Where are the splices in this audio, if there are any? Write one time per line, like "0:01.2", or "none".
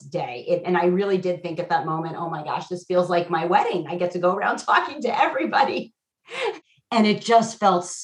0:06.6